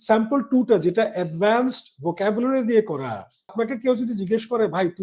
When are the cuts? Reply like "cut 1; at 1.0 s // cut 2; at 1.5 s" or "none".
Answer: cut 1; at 3.5 s